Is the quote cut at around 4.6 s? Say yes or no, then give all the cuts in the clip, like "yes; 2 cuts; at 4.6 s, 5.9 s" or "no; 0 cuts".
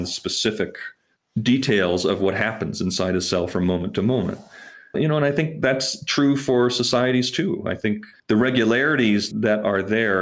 no; 2 cuts; at 8.1 s, 9.3 s